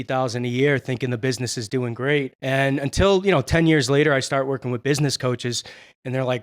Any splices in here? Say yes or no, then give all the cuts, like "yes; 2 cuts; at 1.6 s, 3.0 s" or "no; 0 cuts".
yes; 1 cut; at 2.3 s